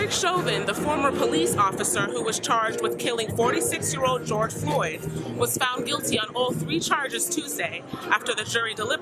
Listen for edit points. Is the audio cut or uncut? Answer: uncut